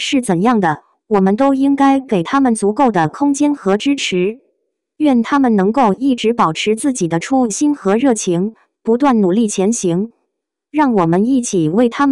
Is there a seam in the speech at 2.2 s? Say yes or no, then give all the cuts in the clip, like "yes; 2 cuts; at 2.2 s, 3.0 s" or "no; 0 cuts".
yes; 1 cut; at 2.2 s